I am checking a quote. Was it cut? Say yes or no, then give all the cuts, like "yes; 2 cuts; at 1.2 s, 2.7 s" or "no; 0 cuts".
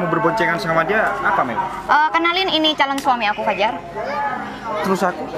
no; 0 cuts